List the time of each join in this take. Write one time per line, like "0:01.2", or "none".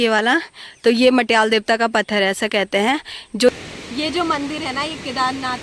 0:03.5